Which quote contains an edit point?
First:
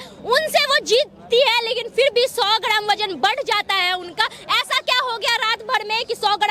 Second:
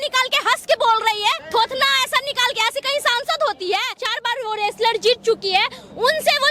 second; 2 cuts; at 1.4 s, 4.1 s

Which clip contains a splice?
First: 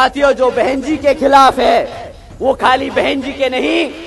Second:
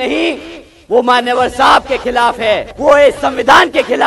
second; 1 cut; at 2.7 s

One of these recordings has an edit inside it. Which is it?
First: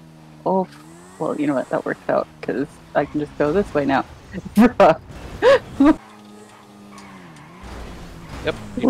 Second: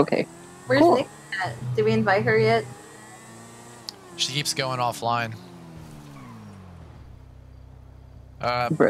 first; 1 cut; at 6.0 s

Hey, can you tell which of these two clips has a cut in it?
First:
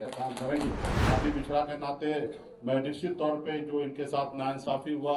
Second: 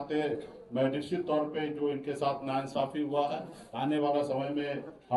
first; 1 cut; at 1.0 s

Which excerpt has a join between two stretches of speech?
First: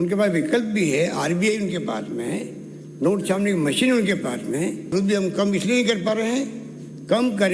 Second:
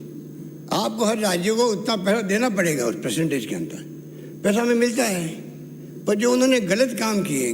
first; 1 cut; at 4.9 s

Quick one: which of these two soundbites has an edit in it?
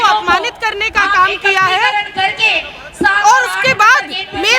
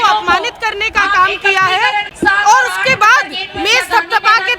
second; 1 cut; at 2.1 s

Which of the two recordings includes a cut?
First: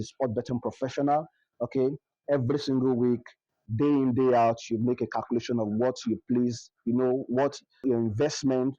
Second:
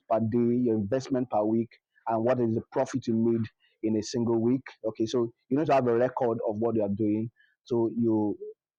first; 1 cut; at 7.8 s

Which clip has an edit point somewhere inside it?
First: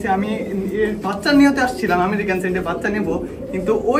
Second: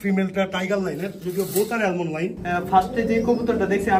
second; 1 cut; at 2.4 s

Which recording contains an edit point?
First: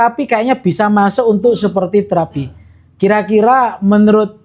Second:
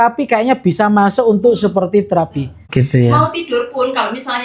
second; 1 cut; at 2.6 s

